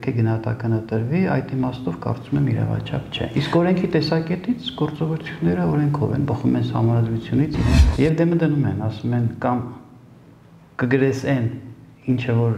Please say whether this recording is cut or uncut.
cut